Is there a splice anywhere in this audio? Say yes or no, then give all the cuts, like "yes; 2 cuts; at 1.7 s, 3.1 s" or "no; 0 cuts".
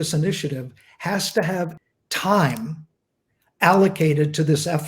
yes; 1 cut; at 1.7 s